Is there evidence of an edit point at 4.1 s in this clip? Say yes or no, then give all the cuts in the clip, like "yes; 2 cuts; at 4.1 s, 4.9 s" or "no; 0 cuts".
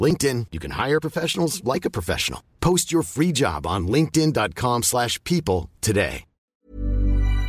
no; 1 cut; at 6.4 s